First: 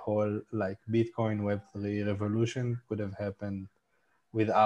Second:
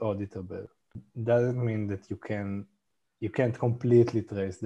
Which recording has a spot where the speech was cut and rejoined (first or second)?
second